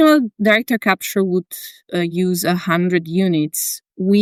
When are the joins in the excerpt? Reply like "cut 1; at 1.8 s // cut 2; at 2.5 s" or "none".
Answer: none